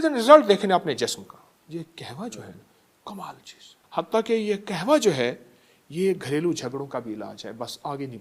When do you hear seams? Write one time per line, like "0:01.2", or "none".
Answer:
0:01.6
0:03.8